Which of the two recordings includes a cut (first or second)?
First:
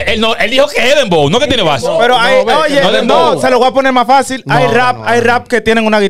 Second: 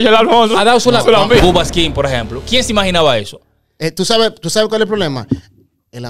second